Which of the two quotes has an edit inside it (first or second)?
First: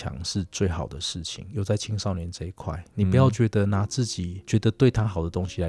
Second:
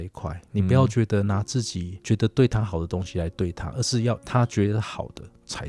second